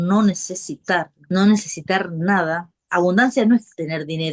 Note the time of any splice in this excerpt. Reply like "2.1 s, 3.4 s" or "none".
1.2 s, 2.7 s